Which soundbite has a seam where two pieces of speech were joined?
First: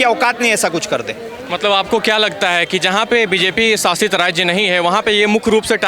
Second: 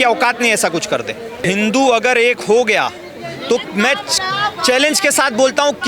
second; 1 cut; at 1.5 s

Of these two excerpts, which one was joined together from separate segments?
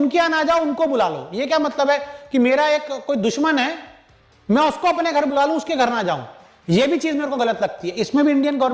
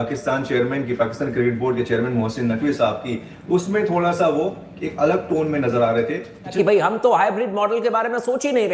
second; 1 cut; at 6.5 s

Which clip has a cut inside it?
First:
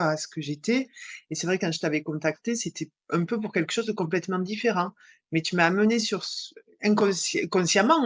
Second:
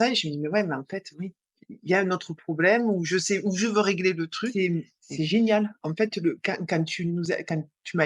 second; 1 cut; at 4.5 s

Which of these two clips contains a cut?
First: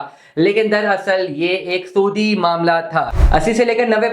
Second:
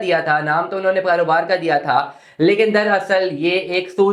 first; 1 cut; at 3.2 s

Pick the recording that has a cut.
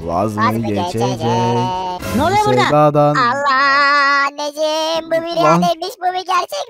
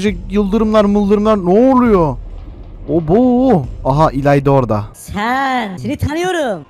second; 2 cuts; at 5.0 s, 5.8 s

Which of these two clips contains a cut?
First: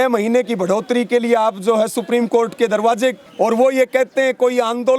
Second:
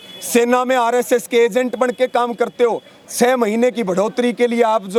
first; 1 cut; at 3.2 s

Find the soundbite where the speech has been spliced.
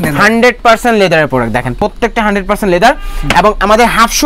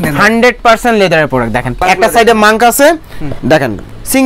second; 1 cut; at 1.7 s

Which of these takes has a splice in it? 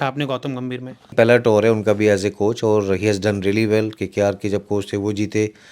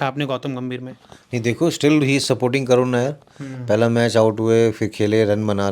first; 1 cut; at 1.1 s

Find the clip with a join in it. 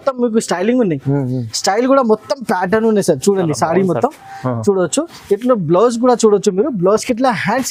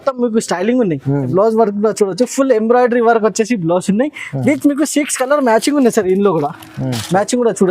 second; 1 cut; at 1.3 s

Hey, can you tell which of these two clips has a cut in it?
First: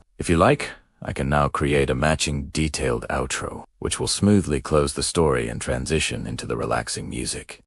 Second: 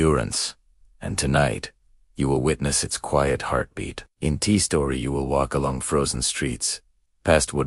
first; 1 cut; at 2.3 s

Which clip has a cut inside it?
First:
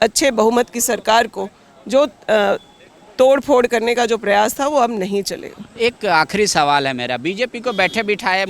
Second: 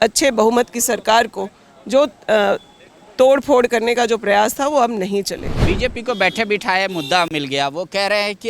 second; 1 cut; at 5.6 s

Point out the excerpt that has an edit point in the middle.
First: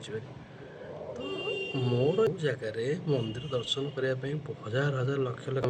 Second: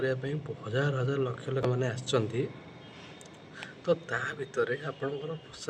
first; 1 cut; at 2.3 s

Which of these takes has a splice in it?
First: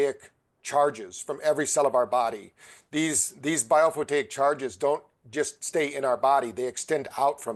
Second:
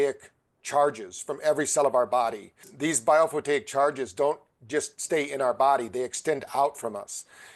second; 1 cut; at 2.6 s

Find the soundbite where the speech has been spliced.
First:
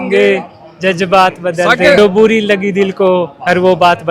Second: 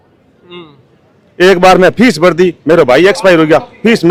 first; 1 cut; at 2.0 s

